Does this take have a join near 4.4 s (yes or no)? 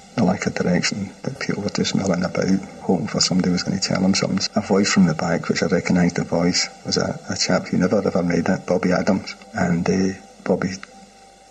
yes